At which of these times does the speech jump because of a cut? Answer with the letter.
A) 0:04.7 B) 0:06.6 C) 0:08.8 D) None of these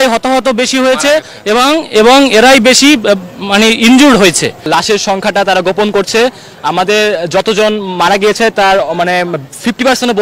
A